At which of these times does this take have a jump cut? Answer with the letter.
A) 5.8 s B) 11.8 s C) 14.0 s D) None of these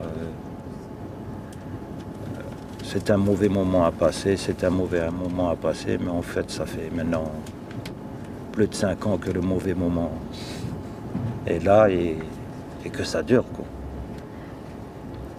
D